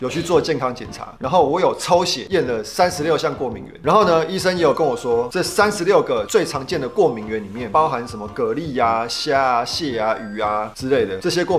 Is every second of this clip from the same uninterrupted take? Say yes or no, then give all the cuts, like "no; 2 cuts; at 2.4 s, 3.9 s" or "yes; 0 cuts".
yes; 0 cuts